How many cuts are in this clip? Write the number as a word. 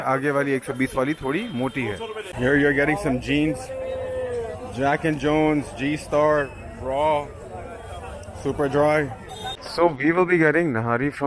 two